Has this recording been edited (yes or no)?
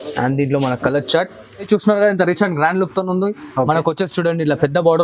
yes